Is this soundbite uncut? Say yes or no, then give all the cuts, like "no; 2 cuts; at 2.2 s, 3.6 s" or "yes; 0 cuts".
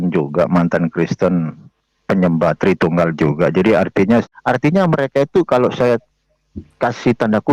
no; 1 cut; at 4.3 s